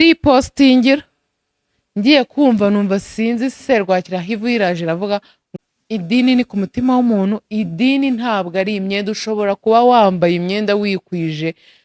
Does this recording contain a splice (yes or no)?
yes